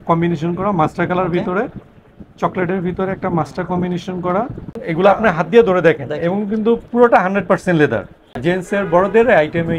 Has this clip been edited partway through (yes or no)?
yes